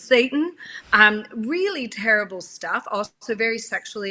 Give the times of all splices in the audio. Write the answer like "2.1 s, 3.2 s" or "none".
none